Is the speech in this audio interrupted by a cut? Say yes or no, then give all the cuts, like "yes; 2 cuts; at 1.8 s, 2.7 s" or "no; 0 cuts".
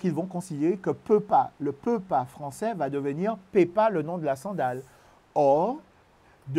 no; 0 cuts